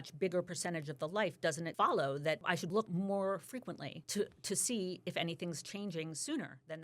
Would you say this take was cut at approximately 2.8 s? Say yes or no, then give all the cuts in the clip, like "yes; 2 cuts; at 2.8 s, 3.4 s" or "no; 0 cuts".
yes; 3 cuts; at 1.7 s, 2.8 s, 3.9 s